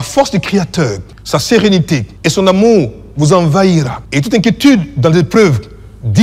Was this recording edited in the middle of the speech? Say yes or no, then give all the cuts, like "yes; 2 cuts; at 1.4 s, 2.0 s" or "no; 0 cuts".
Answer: yes; 3 cuts; at 1.1 s, 2.1 s, 4.0 s